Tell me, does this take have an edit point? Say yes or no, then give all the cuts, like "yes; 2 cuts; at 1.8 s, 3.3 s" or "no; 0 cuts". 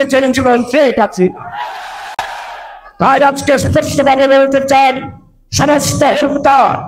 yes; 1 cut; at 2.8 s